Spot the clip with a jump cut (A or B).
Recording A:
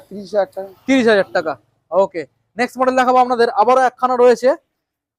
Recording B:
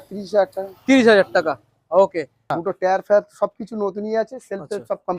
B